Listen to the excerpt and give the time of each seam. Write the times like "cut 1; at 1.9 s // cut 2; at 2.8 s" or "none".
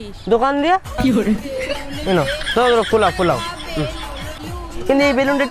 cut 1; at 4.3 s